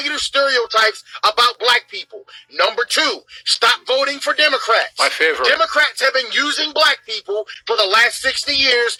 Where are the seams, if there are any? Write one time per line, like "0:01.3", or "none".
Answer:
none